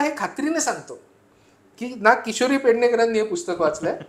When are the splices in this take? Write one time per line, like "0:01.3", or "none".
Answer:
none